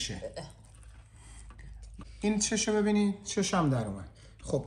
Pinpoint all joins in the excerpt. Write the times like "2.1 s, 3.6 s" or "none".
2.0 s